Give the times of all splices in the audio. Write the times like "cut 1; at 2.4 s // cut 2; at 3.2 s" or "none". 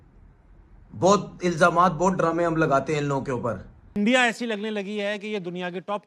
cut 1; at 3.8 s